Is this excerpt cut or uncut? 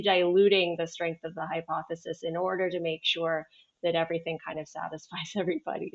uncut